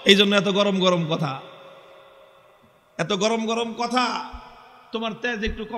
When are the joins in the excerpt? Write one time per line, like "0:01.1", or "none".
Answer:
none